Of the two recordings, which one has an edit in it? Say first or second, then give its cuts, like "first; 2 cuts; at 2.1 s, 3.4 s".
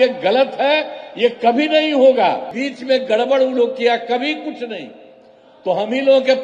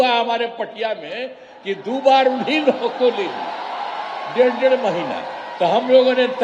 first; 1 cut; at 2.6 s